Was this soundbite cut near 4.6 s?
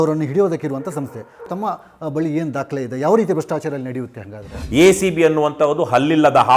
yes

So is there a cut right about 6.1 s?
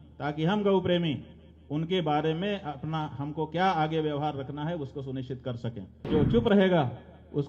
yes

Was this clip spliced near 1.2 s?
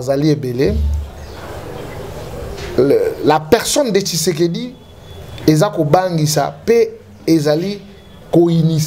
no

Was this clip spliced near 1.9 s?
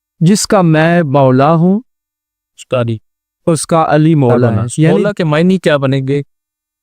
no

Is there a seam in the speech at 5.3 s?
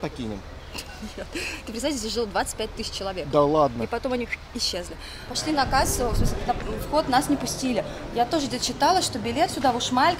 yes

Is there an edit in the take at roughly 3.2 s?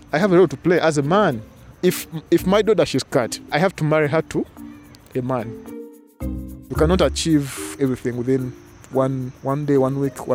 no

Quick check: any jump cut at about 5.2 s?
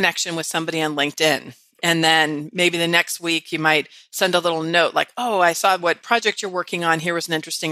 no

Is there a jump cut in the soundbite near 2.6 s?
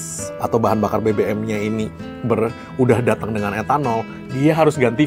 no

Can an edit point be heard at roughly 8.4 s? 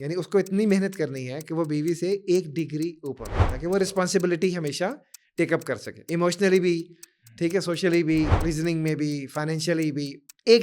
yes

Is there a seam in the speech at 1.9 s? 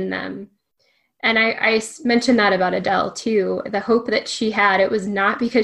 no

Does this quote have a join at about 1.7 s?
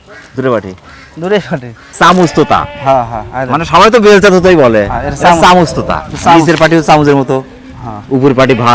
yes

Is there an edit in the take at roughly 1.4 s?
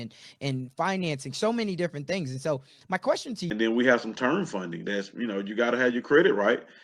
no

